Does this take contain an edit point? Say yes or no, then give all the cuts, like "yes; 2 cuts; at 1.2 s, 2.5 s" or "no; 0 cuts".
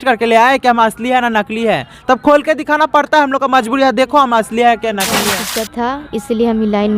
yes; 1 cut; at 5.4 s